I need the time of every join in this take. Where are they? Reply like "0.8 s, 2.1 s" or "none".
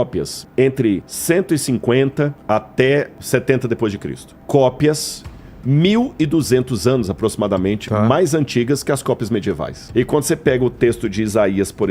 1.1 s, 9.8 s